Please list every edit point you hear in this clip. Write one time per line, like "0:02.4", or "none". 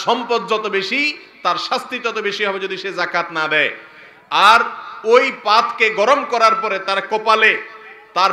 none